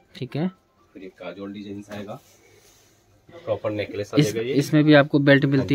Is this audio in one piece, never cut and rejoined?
no; 1 cut; at 3.3 s

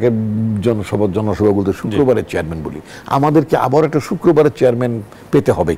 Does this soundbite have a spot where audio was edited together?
no; 0 cuts

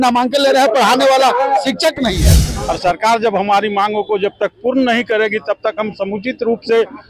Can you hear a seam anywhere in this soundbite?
yes; 1 cut; at 2.5 s

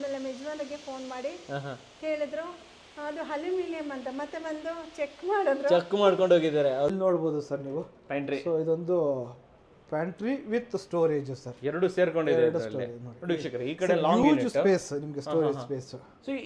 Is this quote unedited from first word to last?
no; 1 cut; at 6.9 s

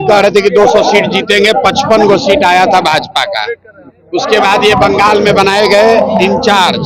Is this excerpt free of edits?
yes; 0 cuts

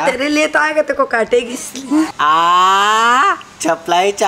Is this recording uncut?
no; 1 cut; at 2.1 s

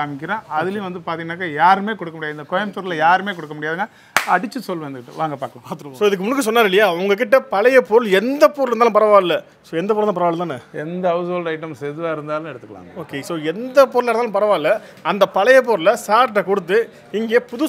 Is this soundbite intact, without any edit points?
no; 1 cut; at 5.9 s

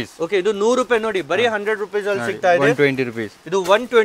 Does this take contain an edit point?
no; 0 cuts

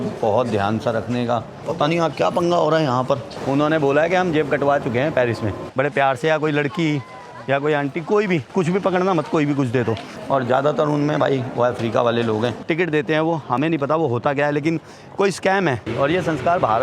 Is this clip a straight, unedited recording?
no; 5 cuts; at 3.3 s, 5.6 s, 10.1 s, 12.6 s, 15.9 s

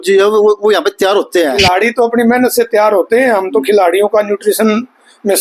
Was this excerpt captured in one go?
no; 1 cut; at 1.6 s

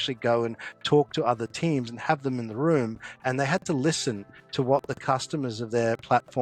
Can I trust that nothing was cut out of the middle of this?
yes; 0 cuts

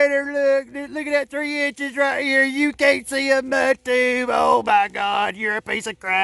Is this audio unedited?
yes; 0 cuts

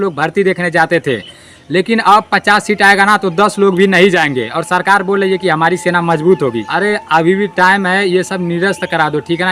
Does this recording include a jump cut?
yes; 1 cut; at 6.6 s

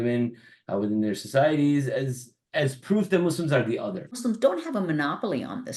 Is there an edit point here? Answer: yes; 1 cut; at 4.1 s

